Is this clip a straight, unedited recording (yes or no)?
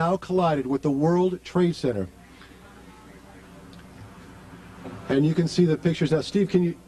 no